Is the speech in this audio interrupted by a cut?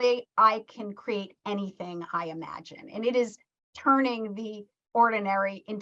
no; 0 cuts

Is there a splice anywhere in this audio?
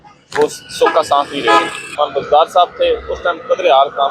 yes; 1 cut; at 1.8 s

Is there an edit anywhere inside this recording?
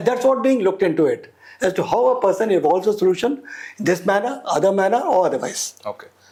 no; 0 cuts

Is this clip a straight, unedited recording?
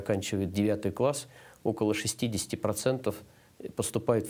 yes; 0 cuts

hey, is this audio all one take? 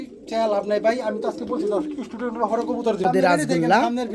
no; 1 cut; at 3.0 s

